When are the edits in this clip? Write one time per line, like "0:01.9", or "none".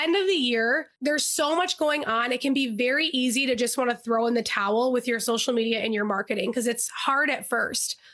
0:00.9